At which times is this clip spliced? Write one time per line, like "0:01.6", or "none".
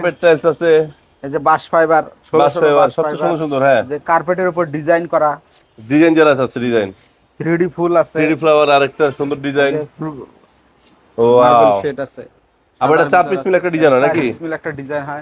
none